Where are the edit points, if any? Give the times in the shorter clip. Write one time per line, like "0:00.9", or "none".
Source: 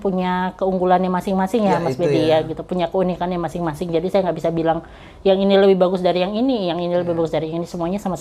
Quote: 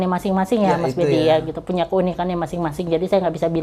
none